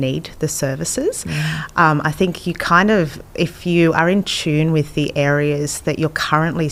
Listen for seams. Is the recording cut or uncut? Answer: uncut